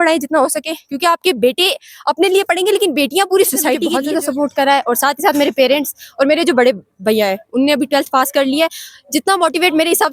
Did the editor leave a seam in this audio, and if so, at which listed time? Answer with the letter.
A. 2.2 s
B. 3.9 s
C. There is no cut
B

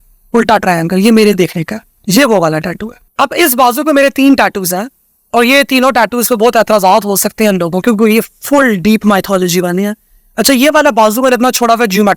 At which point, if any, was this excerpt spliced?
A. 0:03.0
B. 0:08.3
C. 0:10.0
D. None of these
A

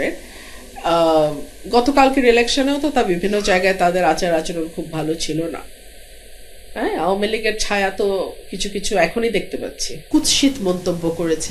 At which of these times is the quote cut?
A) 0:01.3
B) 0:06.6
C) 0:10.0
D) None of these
C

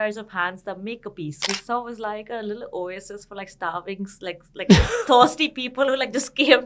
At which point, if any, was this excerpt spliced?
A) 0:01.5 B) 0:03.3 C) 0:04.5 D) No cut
A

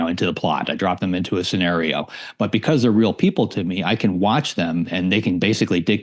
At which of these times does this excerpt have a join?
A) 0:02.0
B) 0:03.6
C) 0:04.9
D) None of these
D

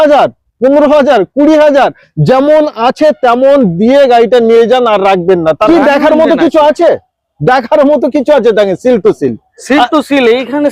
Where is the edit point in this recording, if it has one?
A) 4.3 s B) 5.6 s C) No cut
B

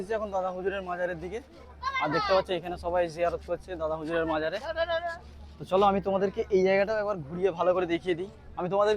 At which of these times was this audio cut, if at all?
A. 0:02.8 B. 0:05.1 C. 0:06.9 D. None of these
D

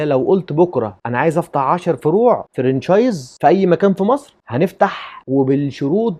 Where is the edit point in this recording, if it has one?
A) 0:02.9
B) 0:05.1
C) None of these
C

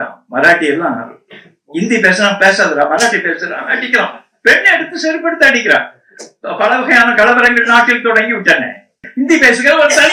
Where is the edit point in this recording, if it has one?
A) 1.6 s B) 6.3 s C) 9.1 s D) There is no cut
C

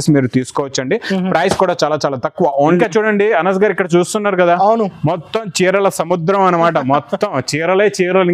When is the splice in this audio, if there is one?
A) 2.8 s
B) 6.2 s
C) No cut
A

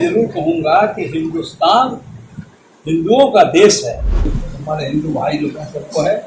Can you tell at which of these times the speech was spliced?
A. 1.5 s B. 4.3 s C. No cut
B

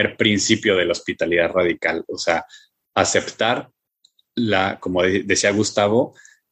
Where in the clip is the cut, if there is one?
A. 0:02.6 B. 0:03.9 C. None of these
C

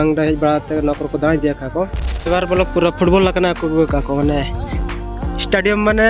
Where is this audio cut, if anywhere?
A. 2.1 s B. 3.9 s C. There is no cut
A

